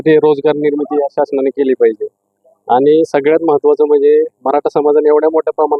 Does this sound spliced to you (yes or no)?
no